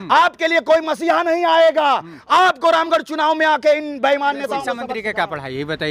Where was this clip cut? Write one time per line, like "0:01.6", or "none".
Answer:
0:04.8